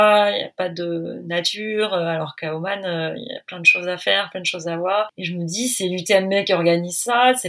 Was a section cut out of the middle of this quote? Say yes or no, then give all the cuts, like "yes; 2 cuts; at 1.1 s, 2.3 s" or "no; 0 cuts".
yes; 1 cut; at 5.2 s